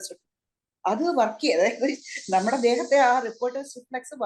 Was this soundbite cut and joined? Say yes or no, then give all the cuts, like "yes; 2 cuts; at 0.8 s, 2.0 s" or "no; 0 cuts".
no; 0 cuts